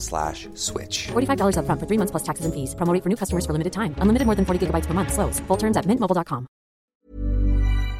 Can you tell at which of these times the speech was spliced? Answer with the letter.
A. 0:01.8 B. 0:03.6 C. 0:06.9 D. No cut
C